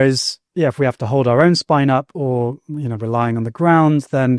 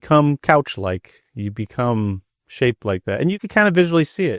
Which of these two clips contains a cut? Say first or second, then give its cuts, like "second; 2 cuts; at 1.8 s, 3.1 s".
second; 1 cut; at 3.4 s